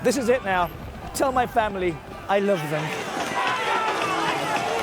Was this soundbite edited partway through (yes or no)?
yes